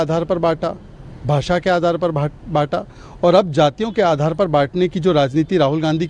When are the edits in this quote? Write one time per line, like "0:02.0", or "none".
none

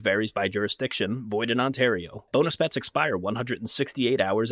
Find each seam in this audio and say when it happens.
none

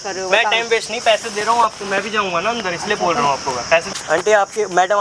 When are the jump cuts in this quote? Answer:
0:03.9

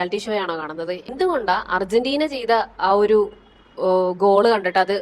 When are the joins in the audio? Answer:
0:01.1

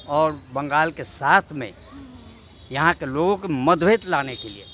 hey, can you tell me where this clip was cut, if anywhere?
none

